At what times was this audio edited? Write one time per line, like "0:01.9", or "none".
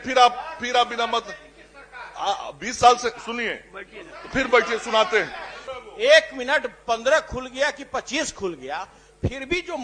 0:05.9

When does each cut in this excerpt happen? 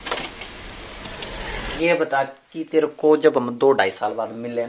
0:01.7

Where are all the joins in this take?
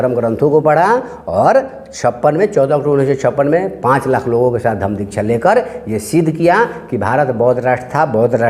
none

